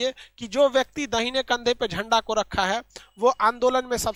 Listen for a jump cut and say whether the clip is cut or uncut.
uncut